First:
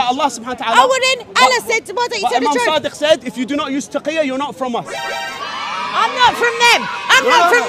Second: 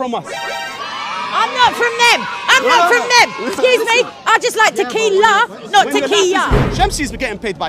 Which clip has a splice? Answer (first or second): second